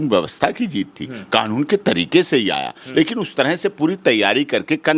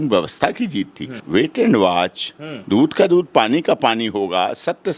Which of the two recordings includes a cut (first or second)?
second